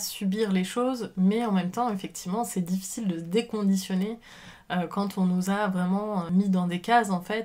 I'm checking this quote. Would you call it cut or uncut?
uncut